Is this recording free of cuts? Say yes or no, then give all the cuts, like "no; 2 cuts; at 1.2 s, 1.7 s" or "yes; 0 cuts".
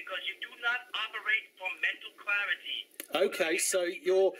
yes; 0 cuts